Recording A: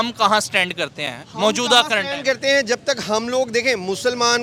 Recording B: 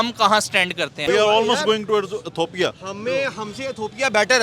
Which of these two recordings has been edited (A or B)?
B